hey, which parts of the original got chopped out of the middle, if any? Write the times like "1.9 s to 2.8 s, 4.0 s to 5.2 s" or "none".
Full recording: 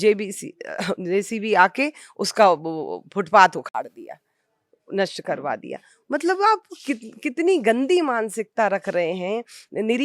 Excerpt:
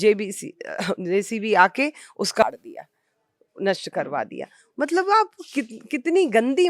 2.4 s to 3.7 s